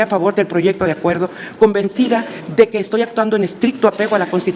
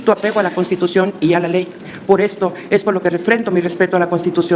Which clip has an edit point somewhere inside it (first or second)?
second